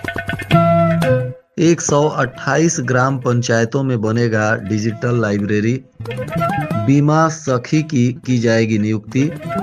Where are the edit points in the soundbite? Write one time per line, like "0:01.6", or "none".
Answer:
0:01.4